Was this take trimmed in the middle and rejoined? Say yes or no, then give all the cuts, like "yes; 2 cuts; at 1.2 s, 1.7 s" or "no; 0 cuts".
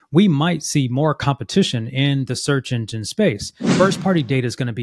yes; 1 cut; at 3.6 s